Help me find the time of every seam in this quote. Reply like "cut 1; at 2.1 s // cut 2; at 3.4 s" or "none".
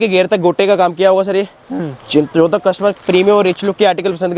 none